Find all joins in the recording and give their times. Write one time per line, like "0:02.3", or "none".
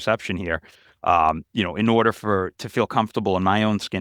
none